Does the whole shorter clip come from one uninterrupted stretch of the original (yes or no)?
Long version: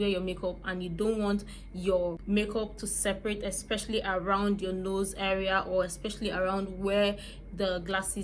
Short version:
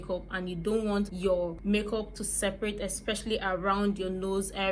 no